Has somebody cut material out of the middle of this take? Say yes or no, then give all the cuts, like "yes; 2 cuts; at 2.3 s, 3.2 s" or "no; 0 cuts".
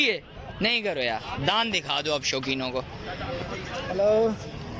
no; 0 cuts